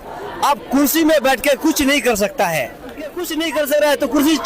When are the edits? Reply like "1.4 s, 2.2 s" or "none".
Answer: 3.4 s